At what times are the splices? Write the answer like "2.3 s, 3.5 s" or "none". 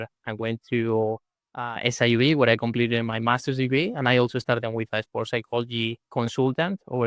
6.0 s